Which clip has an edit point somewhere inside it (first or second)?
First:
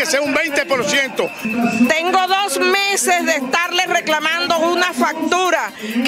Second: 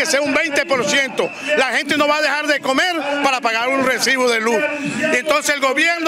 first